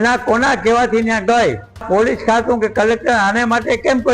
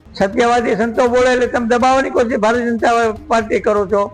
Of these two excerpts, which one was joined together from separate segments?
first; 1 cut; at 1.8 s

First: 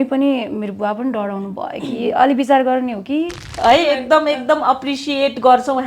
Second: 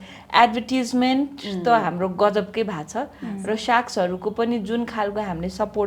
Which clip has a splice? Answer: first; 1 cut; at 3.4 s

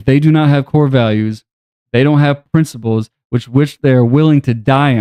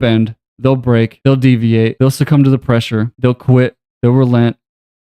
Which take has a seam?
second; 3 cuts; at 1.2 s, 1.9 s, 3.1 s

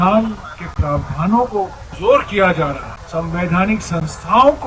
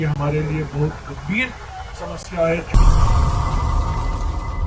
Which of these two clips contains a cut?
first; 2 cuts; at 1.8 s, 2.9 s

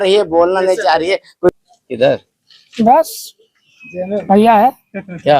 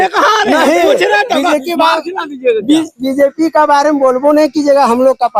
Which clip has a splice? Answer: first; 1 cut; at 1.5 s

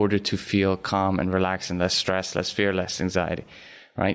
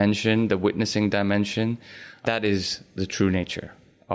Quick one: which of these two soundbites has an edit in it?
second; 1 cut; at 2.1 s

